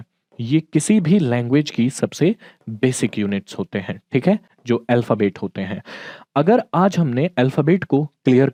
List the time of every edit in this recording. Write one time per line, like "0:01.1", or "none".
none